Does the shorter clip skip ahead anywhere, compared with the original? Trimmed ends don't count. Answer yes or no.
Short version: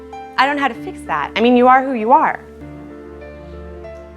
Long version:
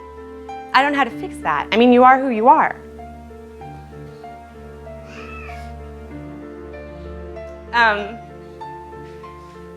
yes